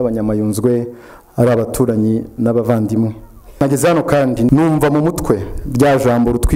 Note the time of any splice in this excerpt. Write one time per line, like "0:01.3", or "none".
0:03.6
0:04.5